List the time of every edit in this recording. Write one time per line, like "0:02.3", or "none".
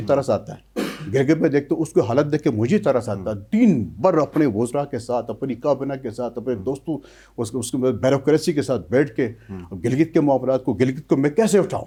none